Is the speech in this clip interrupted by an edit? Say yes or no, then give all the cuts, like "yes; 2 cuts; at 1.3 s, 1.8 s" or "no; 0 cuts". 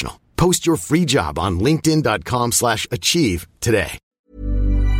yes; 1 cut; at 4.0 s